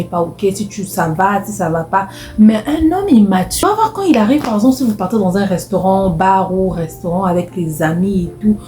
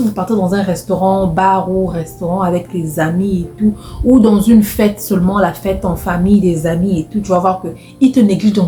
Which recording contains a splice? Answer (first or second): first